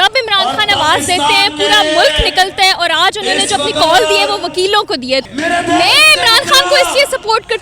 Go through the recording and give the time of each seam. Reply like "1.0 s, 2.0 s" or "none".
5.2 s